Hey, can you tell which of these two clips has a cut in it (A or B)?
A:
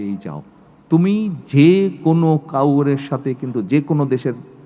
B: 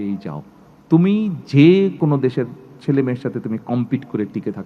B